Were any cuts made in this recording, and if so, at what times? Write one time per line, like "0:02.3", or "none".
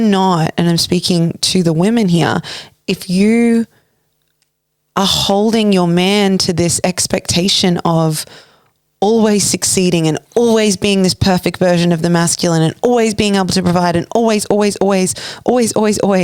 none